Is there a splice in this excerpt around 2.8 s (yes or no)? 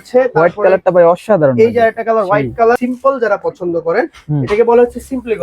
yes